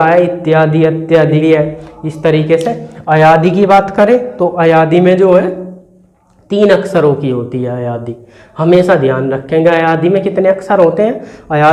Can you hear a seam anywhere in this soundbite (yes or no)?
no